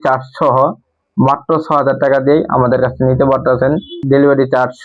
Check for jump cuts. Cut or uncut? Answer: cut